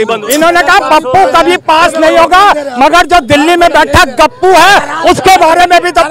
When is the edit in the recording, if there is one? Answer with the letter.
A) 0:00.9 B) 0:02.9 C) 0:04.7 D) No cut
D